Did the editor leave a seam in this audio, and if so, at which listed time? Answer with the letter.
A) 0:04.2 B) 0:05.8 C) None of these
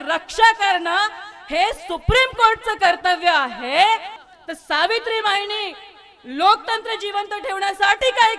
A